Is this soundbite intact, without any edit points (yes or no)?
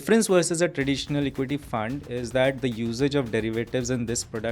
yes